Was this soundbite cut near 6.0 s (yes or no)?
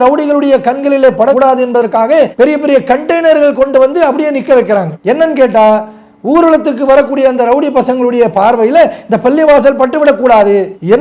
no